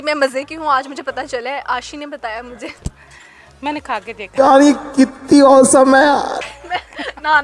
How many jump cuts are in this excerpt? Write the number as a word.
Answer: zero